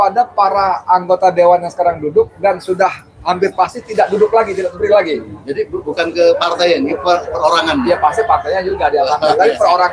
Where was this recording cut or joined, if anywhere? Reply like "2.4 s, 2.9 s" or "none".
none

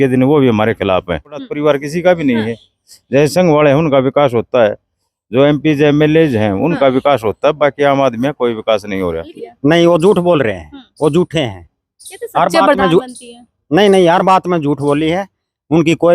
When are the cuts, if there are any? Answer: 1.5 s, 9.3 s

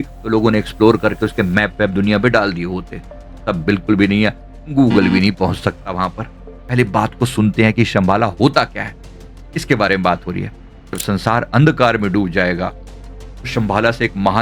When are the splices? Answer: 6.6 s, 11.0 s

